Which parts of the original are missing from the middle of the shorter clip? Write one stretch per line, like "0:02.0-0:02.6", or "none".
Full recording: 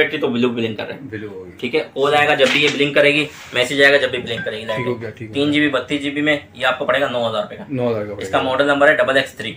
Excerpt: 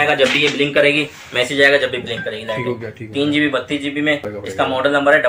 0:06.5-0:08.1